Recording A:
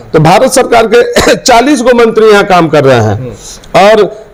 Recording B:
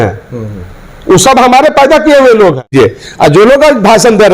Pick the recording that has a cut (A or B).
B